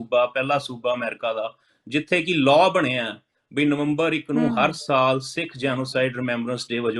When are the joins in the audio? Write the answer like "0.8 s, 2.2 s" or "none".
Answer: none